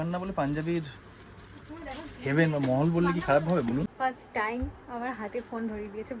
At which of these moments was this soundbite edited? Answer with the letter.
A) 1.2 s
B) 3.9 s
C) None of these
B